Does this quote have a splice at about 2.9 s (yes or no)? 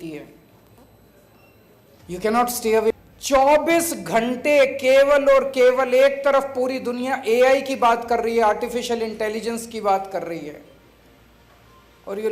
yes